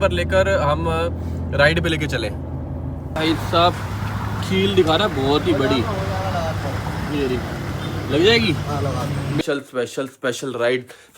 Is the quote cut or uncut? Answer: cut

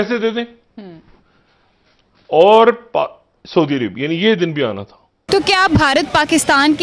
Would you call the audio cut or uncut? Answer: cut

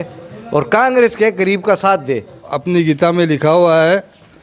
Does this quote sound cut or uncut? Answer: cut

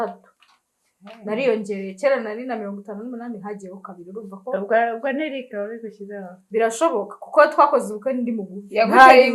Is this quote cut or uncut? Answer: uncut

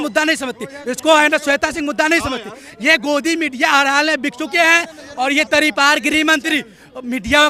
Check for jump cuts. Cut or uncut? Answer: uncut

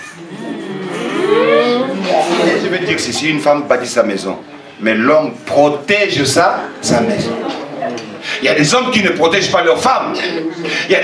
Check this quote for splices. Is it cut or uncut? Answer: cut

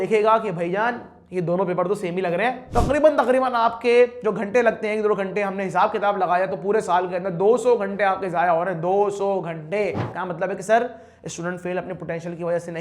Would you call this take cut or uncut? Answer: cut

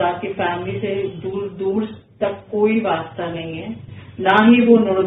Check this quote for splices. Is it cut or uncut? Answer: uncut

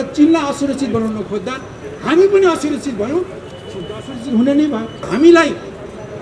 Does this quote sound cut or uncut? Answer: cut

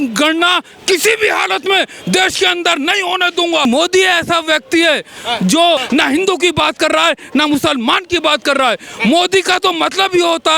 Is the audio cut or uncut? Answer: cut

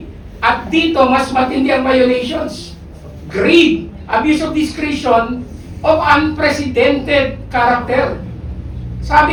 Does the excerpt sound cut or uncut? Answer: uncut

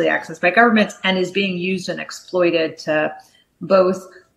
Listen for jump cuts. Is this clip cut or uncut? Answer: uncut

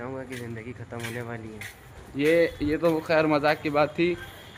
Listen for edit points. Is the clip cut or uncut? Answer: uncut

